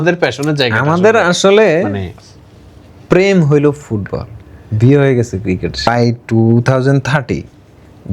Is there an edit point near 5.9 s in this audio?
yes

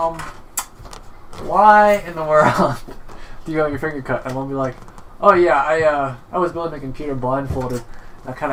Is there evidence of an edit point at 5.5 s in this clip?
no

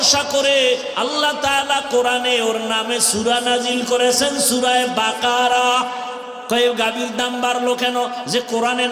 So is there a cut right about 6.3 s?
yes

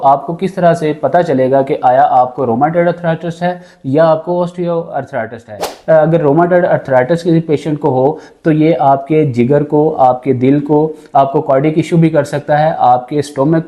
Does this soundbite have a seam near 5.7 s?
yes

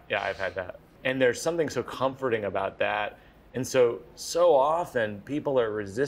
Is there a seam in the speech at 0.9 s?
yes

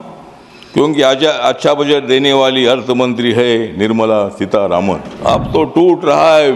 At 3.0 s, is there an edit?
no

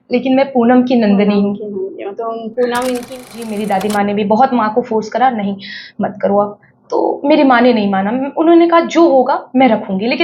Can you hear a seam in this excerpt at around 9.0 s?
no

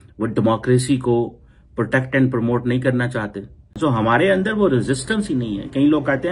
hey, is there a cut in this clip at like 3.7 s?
yes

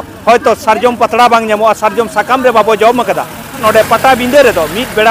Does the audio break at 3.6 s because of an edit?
yes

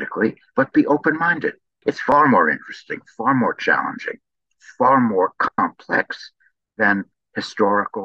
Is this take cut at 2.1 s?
yes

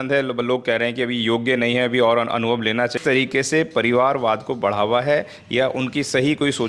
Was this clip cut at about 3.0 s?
yes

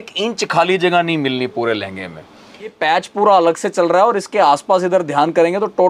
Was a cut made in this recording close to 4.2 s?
no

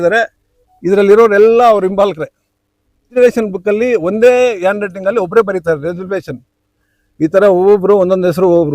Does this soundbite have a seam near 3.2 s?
yes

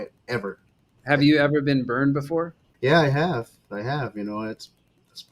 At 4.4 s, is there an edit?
no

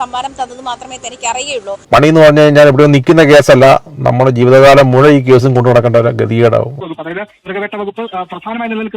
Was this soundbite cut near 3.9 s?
no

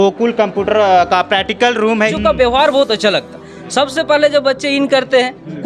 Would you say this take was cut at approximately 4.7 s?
no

